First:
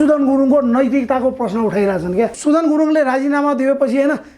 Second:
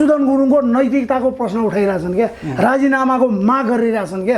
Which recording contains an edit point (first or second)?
first